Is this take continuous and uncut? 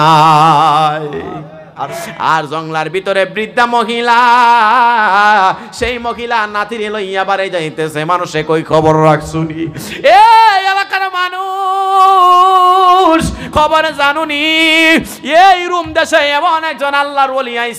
no; 1 cut; at 1.9 s

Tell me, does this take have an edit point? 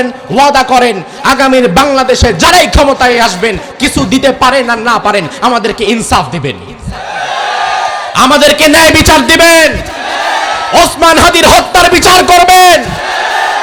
no; 0 cuts

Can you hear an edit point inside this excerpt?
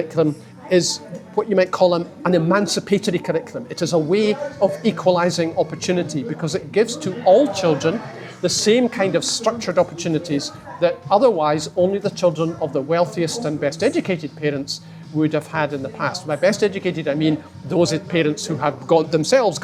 no; 0 cuts

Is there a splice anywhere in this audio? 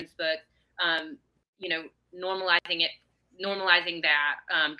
no; 0 cuts

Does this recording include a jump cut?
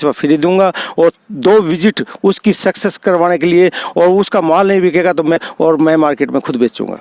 yes; 1 cut; at 5.4 s

